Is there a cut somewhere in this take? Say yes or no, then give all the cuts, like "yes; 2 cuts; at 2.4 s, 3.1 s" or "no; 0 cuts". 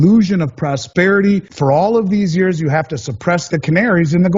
yes; 2 cuts; at 1.5 s, 3.5 s